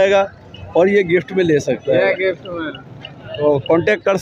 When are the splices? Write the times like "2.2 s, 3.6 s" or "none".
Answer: none

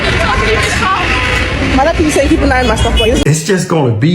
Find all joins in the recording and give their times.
3.2 s

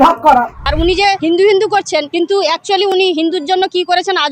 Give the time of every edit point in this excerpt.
1.0 s, 2.1 s

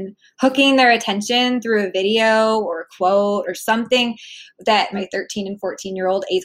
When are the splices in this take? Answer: 4.9 s

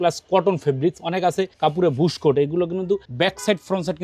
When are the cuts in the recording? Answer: none

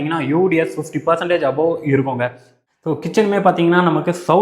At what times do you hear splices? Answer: 2.6 s

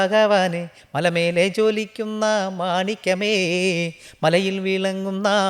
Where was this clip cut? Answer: none

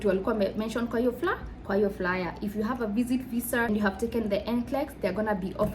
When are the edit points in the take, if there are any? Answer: 3.7 s

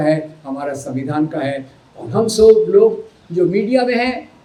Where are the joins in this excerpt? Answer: none

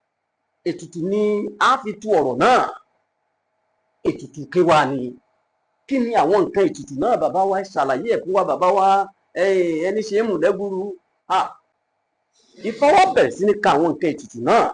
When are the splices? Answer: 11.7 s

